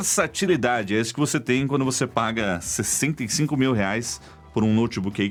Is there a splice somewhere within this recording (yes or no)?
no